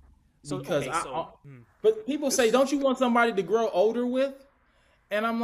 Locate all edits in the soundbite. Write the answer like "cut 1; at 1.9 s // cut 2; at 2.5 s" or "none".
cut 1; at 1.4 s